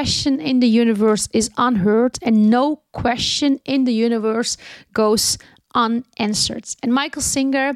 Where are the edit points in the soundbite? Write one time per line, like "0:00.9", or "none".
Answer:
none

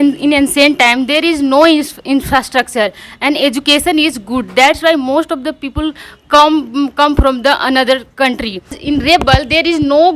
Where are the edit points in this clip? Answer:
0:08.8

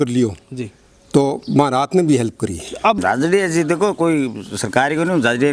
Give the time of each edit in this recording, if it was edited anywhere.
0:03.0

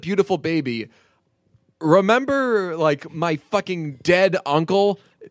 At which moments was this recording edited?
0:03.9

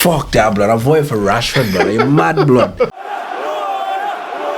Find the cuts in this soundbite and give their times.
0:02.9

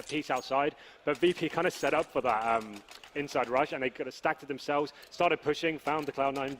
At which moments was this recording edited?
0:03.7

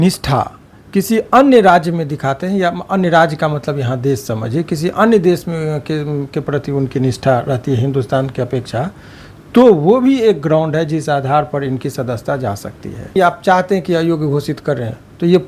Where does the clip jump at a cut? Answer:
0:13.2

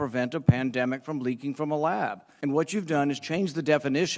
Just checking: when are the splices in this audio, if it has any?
0:02.3

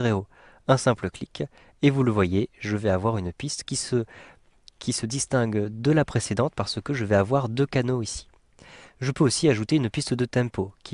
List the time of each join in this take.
0:08.1

